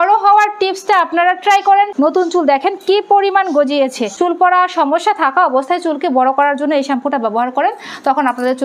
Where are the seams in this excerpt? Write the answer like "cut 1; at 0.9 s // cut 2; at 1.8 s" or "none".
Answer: cut 1; at 1.9 s // cut 2; at 4.0 s